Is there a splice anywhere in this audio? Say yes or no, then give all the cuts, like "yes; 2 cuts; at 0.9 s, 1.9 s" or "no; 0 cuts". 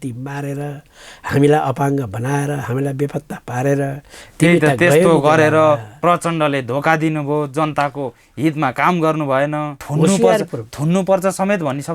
no; 0 cuts